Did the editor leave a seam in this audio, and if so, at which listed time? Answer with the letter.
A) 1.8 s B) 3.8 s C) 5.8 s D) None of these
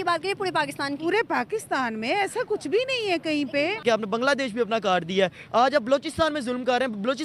B